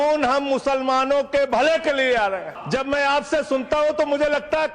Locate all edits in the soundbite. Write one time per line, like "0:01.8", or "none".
0:02.5